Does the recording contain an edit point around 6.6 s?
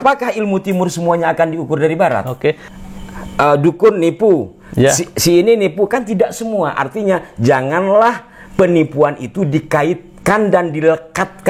no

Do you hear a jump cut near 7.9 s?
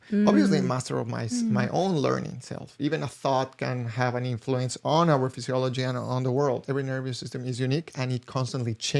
no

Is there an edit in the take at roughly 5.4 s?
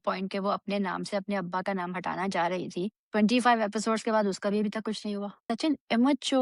yes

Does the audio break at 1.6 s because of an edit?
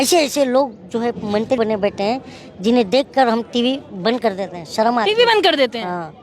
yes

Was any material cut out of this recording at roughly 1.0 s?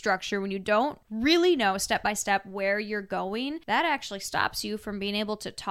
no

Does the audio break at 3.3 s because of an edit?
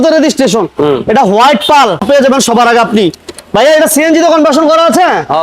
no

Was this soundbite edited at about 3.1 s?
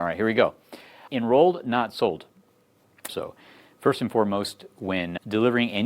yes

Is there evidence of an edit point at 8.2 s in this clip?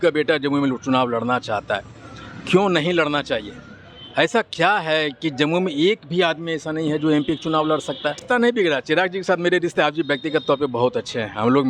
yes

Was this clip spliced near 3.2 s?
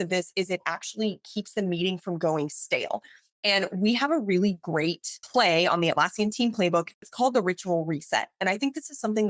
no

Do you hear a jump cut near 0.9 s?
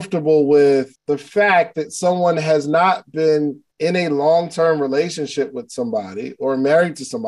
yes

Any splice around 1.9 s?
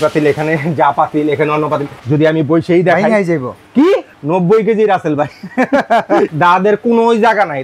yes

